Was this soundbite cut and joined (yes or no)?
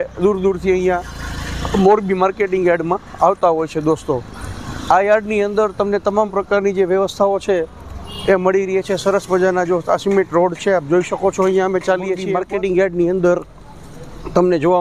yes